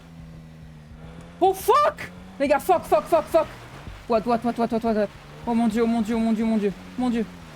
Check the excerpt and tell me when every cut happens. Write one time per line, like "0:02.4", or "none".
none